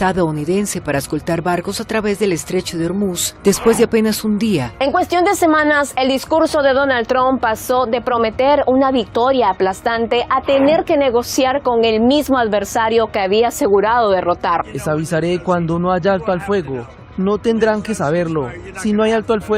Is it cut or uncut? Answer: cut